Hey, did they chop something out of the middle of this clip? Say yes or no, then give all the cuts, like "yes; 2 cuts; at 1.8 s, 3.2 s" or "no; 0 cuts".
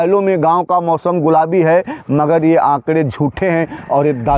no; 0 cuts